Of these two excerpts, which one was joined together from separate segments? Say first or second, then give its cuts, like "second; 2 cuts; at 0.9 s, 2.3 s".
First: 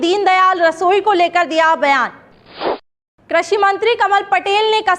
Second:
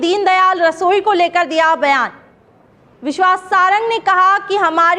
first; 1 cut; at 2.9 s